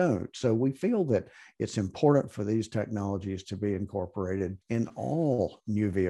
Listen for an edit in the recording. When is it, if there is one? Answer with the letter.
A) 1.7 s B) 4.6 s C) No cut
B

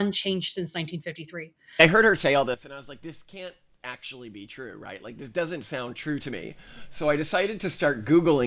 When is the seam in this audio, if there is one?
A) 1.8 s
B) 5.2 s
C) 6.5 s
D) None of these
A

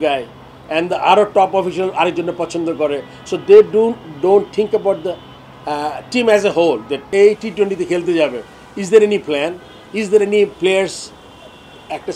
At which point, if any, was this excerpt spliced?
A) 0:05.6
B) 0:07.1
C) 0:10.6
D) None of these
B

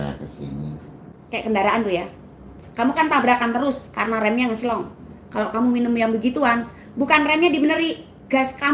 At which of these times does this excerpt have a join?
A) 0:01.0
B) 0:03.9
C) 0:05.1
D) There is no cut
A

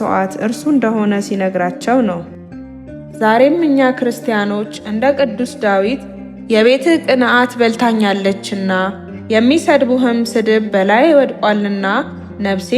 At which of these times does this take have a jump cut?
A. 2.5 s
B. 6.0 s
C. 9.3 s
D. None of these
A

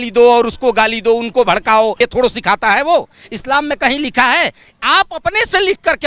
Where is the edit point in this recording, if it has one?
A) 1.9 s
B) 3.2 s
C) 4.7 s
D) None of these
D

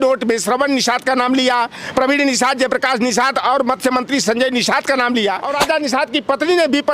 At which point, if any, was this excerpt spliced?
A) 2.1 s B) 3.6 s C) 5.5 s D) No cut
C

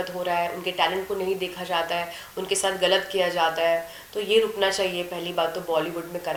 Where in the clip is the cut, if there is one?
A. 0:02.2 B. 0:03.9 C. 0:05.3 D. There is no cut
D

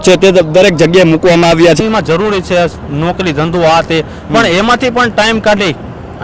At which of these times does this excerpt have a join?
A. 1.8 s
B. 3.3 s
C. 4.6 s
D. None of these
A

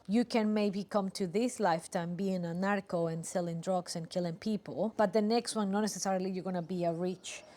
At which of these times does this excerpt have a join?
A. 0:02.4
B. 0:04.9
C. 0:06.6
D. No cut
B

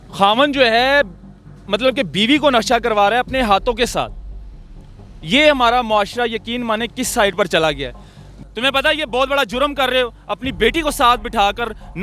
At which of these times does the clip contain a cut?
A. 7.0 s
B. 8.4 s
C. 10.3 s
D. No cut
B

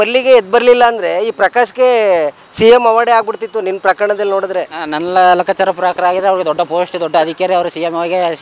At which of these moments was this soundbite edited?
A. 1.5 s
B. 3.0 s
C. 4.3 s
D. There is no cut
D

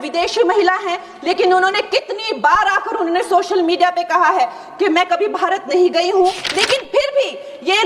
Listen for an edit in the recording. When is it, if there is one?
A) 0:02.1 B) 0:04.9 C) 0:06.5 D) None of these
C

